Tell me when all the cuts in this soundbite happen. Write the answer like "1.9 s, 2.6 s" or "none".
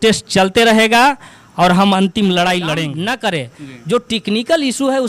2.8 s